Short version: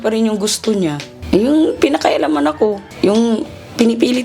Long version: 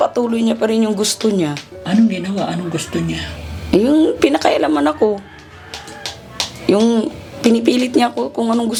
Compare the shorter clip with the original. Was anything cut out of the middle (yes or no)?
yes